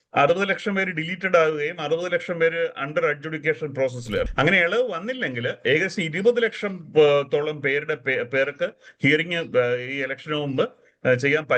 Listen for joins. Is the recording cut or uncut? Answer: cut